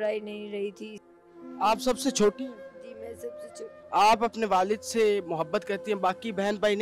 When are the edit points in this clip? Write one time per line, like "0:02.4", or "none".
0:01.2

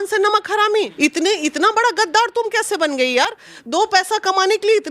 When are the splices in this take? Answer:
0:00.9

